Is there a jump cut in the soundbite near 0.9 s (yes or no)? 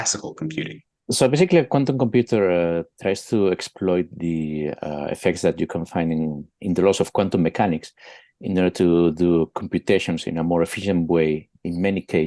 yes